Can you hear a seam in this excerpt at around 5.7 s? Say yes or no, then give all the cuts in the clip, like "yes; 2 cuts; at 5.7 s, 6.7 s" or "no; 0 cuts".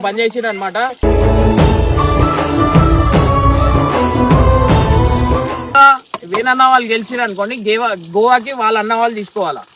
yes; 1 cut; at 5.7 s